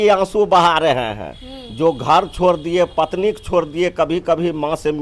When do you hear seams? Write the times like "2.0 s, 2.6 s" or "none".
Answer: none